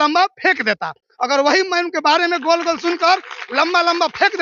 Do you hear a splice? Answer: no; 0 cuts

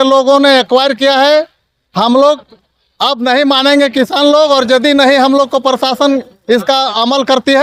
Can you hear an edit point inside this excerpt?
no; 0 cuts

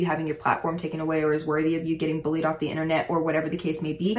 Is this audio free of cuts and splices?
yes; 0 cuts

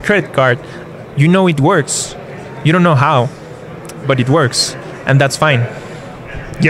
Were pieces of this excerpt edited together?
no; 0 cuts

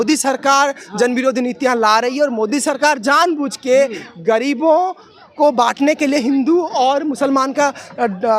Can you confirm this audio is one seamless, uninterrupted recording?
yes; 0 cuts

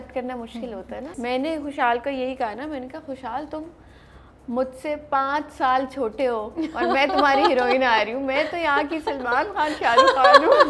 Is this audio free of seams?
no; 1 cut; at 1.1 s

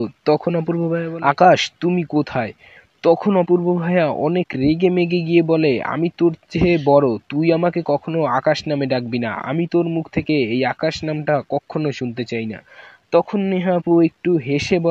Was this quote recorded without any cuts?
no; 1 cut; at 1.1 s

